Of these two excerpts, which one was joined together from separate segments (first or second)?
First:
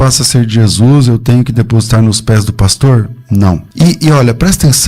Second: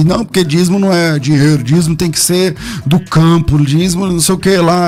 first